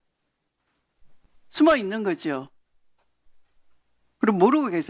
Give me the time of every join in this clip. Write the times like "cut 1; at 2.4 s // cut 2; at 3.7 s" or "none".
none